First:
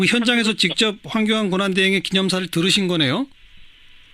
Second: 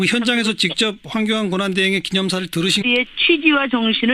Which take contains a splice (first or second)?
first